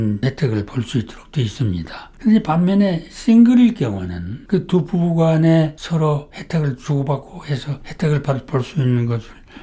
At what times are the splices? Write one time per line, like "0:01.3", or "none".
none